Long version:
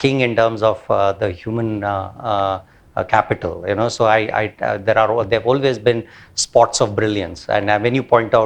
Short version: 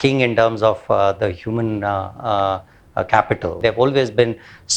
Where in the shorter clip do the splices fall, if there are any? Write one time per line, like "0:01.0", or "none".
0:03.6